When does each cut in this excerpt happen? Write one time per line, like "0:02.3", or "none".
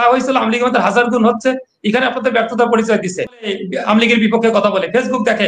0:03.5